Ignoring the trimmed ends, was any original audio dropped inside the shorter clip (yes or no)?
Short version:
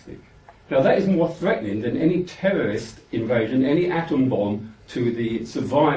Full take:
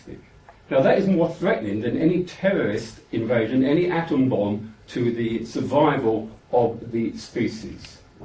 no